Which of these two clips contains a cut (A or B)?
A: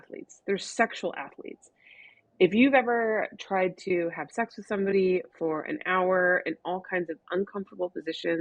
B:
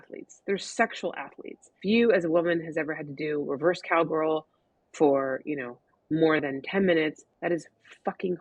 B